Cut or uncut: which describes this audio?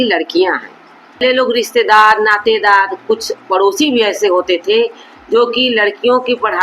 cut